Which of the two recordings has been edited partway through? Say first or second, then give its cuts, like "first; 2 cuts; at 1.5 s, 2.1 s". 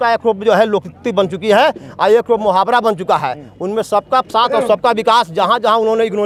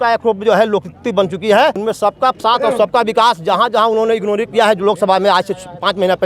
second; 1 cut; at 1.8 s